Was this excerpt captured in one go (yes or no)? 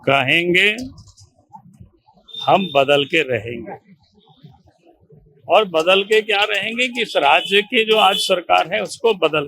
yes